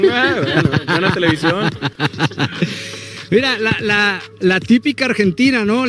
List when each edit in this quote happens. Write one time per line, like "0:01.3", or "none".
none